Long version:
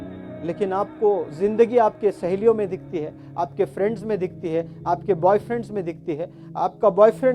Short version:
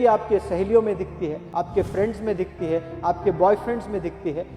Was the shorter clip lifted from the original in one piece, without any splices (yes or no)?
no